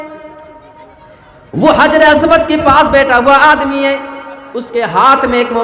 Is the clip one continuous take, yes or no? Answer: yes